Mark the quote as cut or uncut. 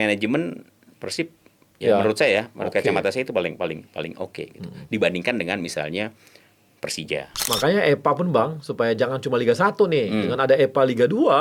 cut